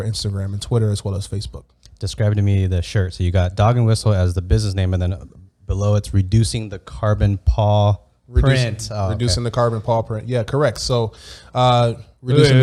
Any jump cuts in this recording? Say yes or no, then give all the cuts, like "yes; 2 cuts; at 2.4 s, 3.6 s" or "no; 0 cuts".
no; 0 cuts